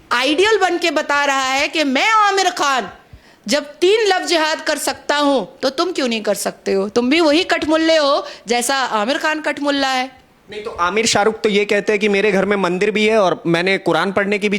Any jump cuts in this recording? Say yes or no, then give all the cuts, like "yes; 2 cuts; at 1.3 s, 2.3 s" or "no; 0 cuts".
no; 0 cuts